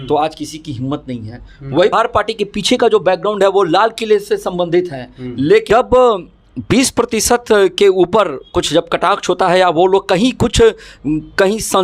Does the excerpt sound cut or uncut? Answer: cut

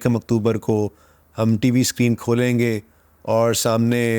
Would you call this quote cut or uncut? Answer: uncut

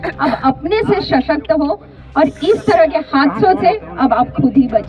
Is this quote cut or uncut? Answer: uncut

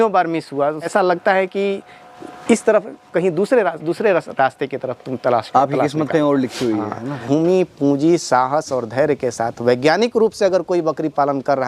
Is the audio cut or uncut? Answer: cut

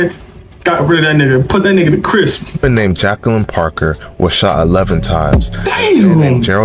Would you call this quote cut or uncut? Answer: cut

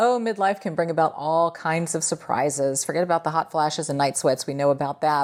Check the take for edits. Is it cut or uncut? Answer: uncut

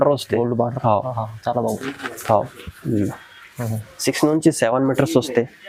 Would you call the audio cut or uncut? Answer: uncut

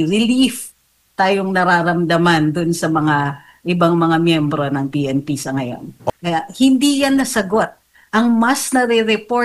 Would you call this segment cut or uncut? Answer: cut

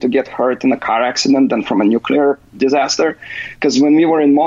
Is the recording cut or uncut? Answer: uncut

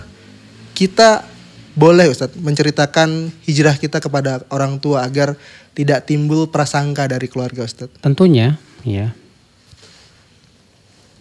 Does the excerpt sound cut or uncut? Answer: cut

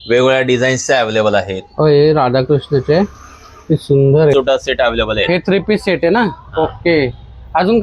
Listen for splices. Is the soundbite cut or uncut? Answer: cut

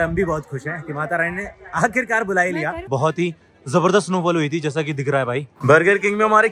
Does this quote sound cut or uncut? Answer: cut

